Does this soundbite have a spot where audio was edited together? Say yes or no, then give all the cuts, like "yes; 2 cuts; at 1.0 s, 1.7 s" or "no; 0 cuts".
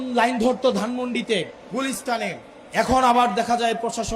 yes; 2 cuts; at 1.6 s, 2.5 s